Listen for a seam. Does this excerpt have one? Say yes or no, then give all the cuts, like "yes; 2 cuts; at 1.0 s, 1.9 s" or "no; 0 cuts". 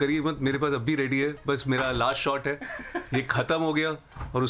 no; 0 cuts